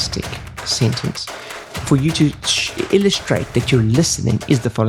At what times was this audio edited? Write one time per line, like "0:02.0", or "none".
none